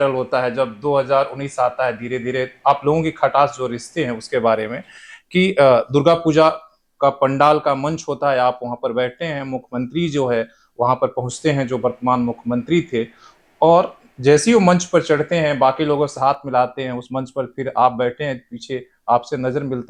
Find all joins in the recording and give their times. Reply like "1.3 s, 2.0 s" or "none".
none

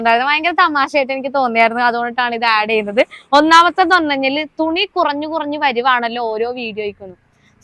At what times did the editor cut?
none

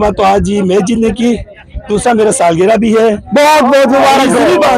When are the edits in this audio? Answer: none

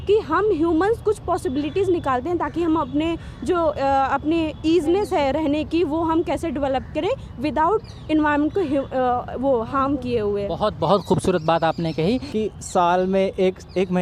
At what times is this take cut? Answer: 12.3 s

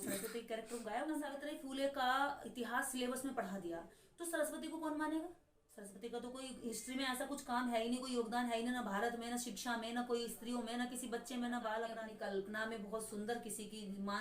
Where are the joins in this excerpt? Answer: 1.3 s, 12.0 s

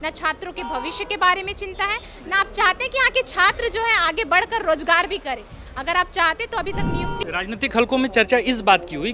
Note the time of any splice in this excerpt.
7.2 s

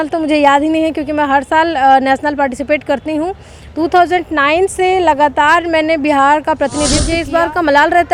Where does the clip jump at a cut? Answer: 7.1 s

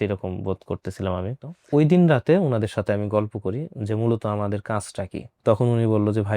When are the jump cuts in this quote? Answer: 1.5 s

